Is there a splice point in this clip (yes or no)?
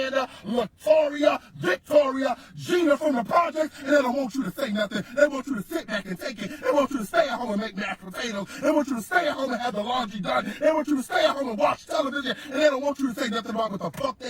yes